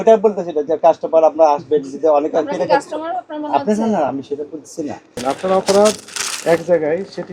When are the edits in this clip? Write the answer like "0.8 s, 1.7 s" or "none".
5.2 s

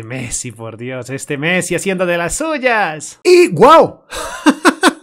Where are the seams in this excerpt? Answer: none

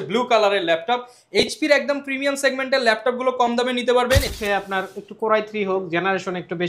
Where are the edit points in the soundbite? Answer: 4.3 s

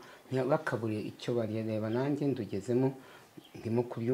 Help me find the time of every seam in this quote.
none

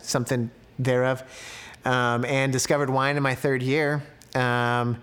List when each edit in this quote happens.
none

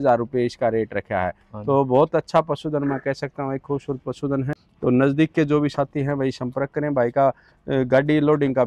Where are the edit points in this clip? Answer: none

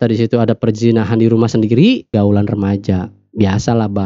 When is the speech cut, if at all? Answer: 2.1 s

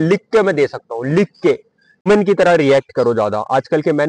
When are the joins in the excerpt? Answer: 2.1 s

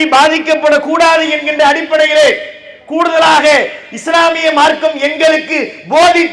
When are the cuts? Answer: none

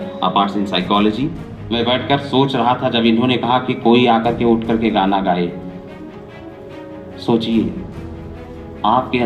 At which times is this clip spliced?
1.6 s

